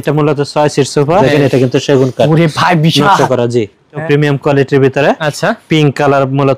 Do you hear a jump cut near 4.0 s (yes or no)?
yes